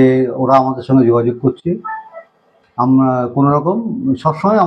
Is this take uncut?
yes; 0 cuts

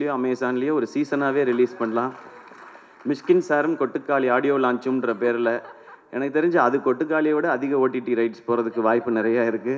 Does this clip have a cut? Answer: no; 0 cuts

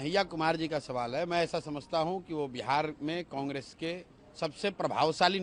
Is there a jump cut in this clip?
no; 0 cuts

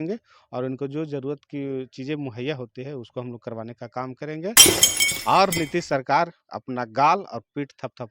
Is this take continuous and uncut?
no; 1 cut; at 4.6 s

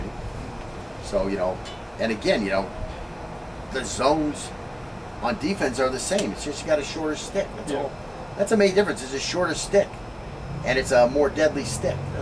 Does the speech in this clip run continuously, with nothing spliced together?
yes; 0 cuts

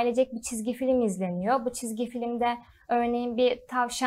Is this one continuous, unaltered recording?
yes; 0 cuts

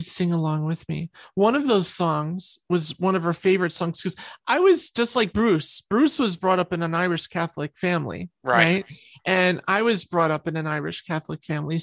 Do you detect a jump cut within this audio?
no; 0 cuts

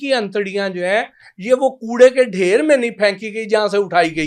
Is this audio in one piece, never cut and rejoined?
yes; 0 cuts

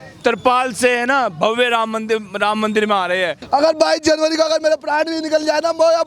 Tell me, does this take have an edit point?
yes; 1 cut; at 3.4 s

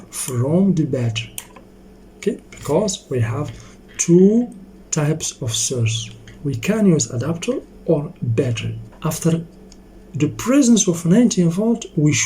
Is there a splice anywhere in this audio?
yes; 1 cut; at 8.8 s

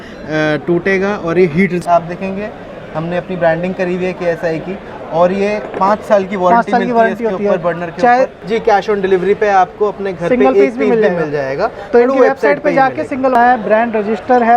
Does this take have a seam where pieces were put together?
yes; 3 cuts; at 1.8 s, 8.4 s, 13.4 s

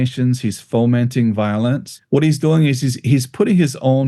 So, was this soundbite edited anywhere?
yes; 1 cut; at 1.9 s

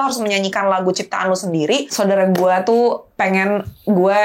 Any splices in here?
yes; 1 cut; at 1.9 s

